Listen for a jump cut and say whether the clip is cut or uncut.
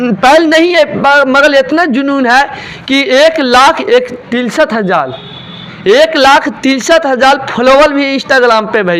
uncut